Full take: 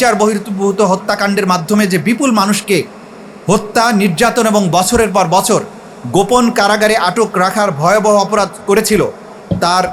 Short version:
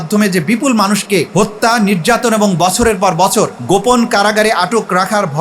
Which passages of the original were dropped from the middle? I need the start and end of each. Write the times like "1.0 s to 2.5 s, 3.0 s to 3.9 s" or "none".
2.9 s to 3.4 s, 5.7 s to 6.0 s